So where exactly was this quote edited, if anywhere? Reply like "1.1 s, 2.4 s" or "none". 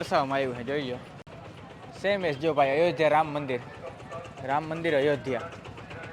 none